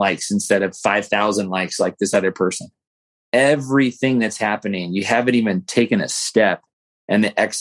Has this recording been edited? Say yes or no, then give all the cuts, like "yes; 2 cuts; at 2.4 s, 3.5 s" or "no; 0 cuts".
no; 0 cuts